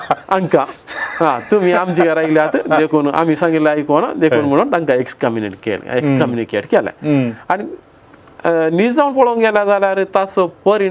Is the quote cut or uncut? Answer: uncut